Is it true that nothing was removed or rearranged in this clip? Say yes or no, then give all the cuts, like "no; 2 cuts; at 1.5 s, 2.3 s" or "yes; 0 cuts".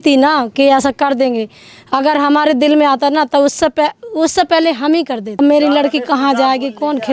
no; 1 cut; at 5.4 s